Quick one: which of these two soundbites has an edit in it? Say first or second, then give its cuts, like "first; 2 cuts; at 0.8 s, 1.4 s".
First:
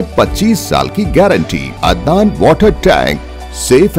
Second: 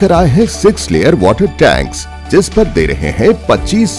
first; 1 cut; at 1.7 s